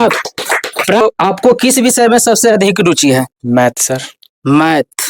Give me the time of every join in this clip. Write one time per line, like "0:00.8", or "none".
0:01.0